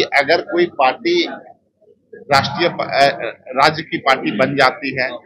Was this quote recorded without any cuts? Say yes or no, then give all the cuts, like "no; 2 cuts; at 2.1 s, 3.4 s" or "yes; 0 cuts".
yes; 0 cuts